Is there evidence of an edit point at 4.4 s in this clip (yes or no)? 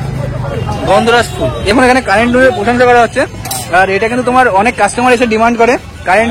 no